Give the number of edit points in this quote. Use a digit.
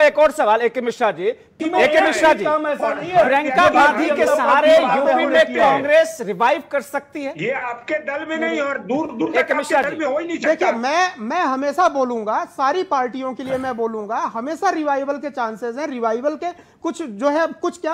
1